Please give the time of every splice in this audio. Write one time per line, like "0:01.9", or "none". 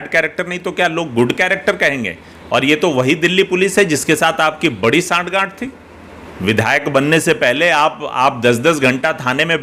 none